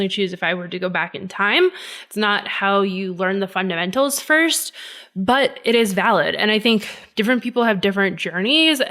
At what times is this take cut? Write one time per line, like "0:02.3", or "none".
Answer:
0:07.0